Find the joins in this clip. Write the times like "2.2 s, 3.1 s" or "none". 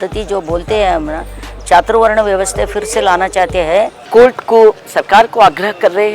4.0 s